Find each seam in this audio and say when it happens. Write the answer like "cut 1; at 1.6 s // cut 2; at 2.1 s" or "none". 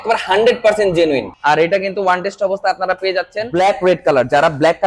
cut 1; at 1.3 s // cut 2; at 3.4 s